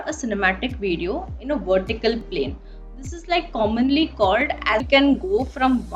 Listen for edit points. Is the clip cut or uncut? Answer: cut